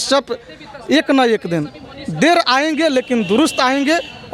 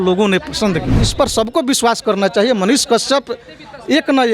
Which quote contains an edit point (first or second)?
second